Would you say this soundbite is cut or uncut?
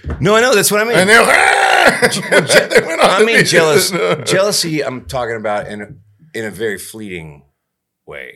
uncut